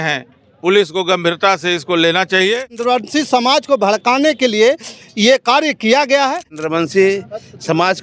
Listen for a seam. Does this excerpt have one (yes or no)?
yes